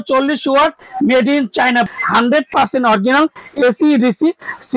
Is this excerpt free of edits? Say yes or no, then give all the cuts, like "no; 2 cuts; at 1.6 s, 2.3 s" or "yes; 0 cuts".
no; 1 cut; at 1.9 s